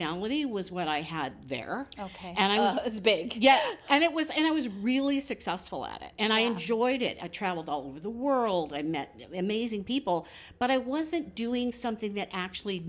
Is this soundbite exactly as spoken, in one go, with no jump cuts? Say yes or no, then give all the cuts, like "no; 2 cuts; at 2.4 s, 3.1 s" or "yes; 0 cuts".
yes; 0 cuts